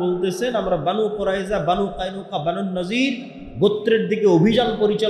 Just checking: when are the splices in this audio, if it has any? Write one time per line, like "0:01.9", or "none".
none